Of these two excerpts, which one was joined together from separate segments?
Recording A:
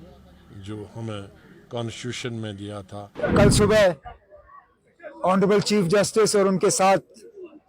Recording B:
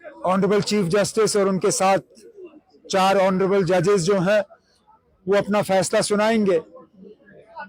A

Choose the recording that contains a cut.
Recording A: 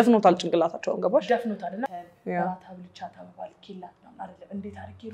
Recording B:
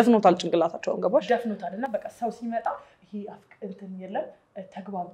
A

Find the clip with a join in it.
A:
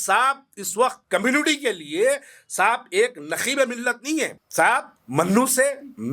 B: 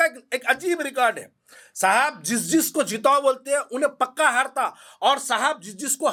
A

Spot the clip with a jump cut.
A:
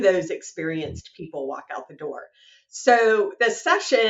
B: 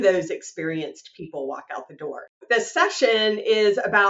B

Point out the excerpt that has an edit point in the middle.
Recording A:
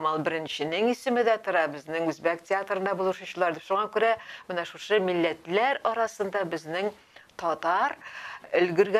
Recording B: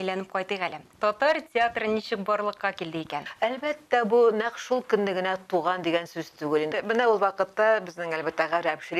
B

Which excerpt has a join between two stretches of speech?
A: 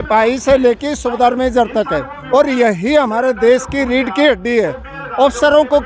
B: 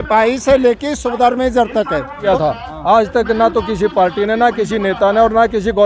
B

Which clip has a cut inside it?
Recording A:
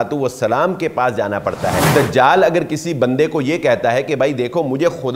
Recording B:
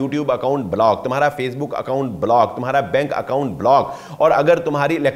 A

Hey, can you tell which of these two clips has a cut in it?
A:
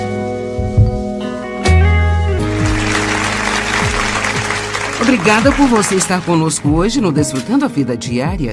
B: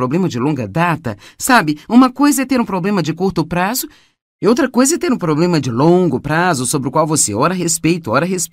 B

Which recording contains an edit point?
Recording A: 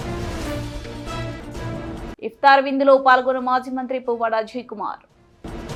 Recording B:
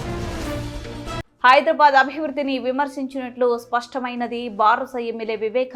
B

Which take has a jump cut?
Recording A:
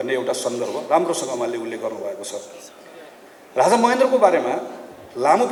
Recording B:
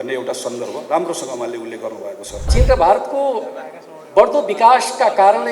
B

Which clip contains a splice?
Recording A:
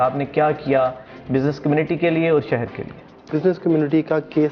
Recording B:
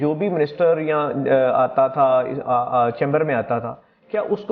A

